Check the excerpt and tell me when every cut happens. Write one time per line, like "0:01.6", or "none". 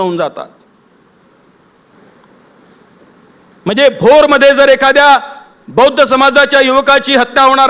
0:01.9